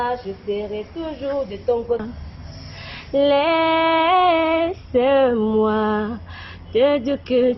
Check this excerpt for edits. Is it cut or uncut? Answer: cut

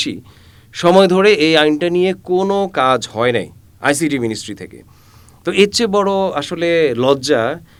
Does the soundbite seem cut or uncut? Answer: uncut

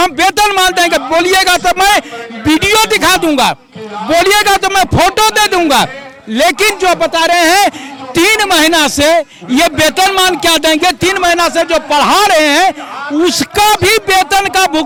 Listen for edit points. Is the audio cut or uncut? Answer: uncut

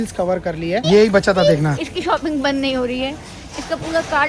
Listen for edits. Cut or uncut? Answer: cut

